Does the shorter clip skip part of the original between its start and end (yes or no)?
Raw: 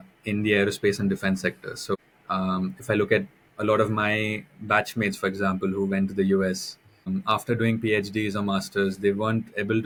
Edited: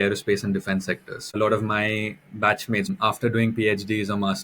yes